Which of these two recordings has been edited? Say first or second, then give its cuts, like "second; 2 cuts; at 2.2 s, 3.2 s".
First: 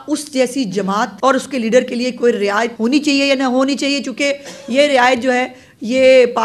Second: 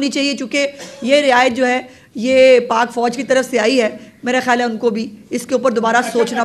first; 2 cuts; at 1.1 s, 2.7 s